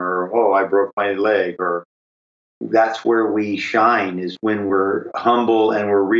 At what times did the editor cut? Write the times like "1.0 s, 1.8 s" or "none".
2.2 s